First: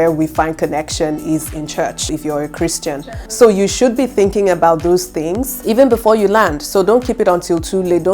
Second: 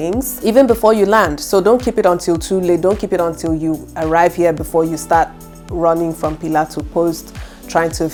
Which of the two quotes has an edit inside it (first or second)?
first